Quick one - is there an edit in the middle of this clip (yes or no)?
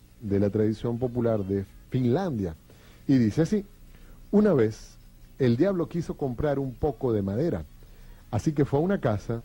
no